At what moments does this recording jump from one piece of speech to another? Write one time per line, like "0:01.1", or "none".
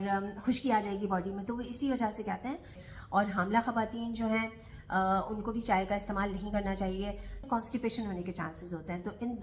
0:02.8
0:07.4